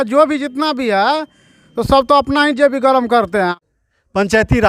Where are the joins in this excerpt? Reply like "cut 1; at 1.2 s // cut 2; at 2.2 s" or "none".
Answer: cut 1; at 3.6 s